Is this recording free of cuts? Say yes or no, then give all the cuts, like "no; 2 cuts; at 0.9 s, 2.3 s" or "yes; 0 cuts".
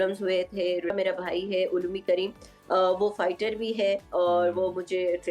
no; 1 cut; at 0.9 s